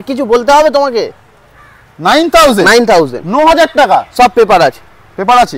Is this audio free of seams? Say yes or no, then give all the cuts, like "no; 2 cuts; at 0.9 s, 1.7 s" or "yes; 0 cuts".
yes; 0 cuts